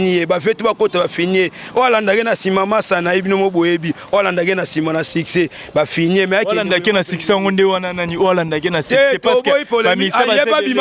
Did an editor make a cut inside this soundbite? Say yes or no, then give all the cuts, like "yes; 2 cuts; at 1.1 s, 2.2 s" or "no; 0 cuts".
no; 0 cuts